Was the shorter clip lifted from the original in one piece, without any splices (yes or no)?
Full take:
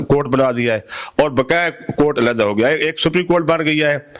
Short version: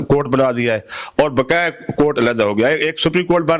yes